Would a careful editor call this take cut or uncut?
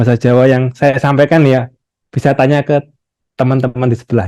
uncut